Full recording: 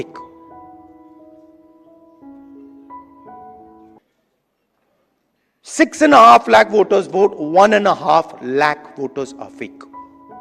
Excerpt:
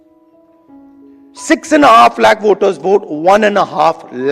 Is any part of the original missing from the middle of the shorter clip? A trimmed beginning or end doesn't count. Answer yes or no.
yes